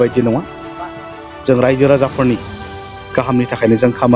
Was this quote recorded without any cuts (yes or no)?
yes